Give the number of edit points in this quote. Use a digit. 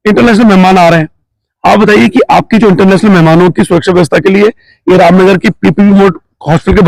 0